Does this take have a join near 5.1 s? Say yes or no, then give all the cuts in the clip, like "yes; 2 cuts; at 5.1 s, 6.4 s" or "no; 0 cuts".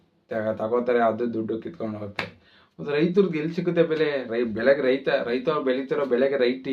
no; 0 cuts